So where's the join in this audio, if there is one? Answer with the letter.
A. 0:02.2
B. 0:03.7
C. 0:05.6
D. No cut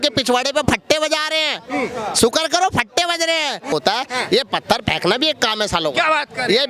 B